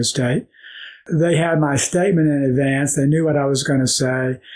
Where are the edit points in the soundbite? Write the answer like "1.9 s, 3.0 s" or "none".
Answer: 1.0 s